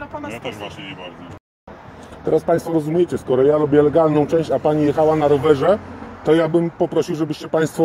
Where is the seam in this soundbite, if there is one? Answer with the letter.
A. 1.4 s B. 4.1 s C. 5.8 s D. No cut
A